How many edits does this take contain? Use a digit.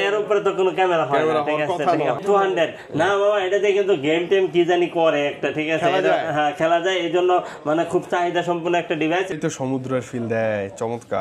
2